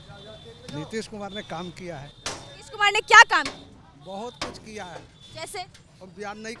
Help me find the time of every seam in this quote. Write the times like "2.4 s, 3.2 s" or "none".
none